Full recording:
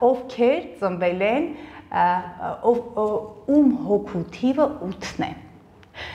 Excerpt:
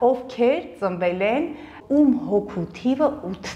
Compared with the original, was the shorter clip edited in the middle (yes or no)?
yes